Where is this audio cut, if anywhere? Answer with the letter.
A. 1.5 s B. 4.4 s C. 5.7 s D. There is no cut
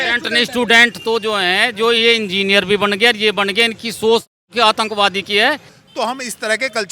C